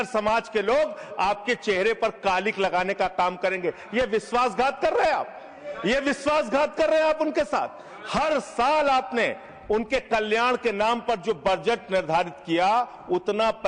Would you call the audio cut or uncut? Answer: uncut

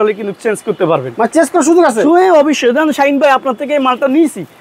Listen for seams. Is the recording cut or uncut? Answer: uncut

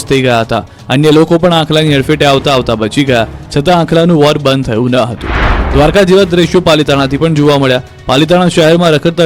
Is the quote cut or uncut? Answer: uncut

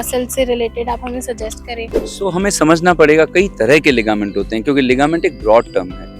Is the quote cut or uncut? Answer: cut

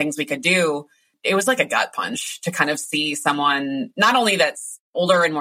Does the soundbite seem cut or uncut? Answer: cut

